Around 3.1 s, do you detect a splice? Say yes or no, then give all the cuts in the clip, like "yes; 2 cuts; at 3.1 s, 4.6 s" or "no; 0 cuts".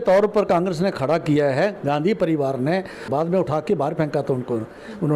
yes; 1 cut; at 3.1 s